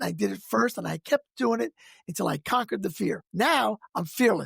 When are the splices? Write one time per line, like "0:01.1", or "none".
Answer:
0:03.2